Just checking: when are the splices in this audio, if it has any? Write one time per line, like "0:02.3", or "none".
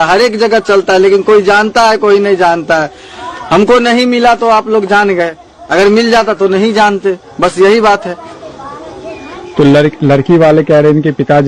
none